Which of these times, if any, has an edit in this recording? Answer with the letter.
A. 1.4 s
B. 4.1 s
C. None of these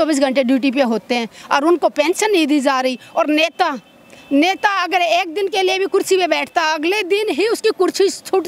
C